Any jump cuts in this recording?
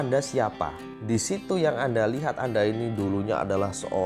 yes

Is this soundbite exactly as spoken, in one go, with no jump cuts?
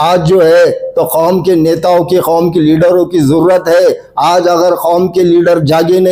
yes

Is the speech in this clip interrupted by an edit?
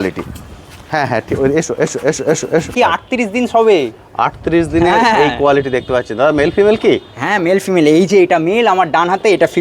yes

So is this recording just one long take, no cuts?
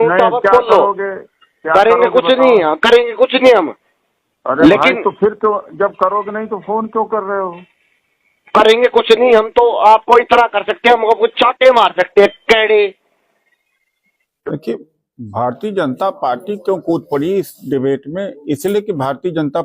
no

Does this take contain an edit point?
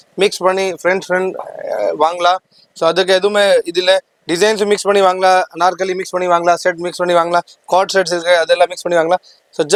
no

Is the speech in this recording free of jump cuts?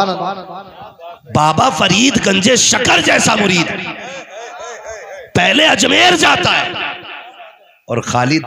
yes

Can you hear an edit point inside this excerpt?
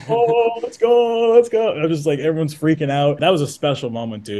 yes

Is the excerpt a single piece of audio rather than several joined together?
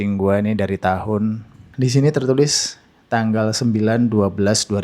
no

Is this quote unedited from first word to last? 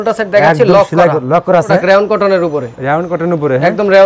no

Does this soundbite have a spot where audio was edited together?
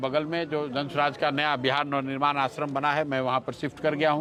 no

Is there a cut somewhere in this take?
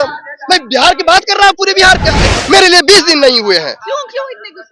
yes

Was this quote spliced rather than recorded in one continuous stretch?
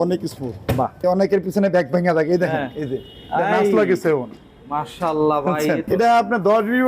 yes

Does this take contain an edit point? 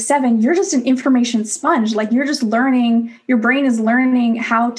no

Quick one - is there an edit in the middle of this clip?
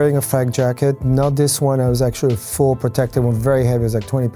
no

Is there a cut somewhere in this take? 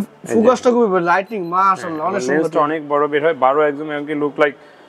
no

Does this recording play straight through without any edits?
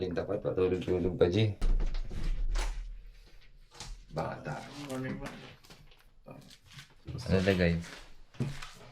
no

